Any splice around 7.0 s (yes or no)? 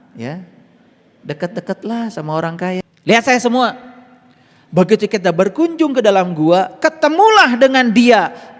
no